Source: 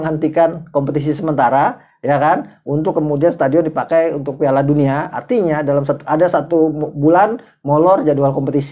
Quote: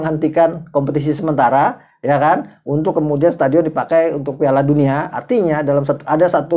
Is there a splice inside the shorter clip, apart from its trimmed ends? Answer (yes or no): no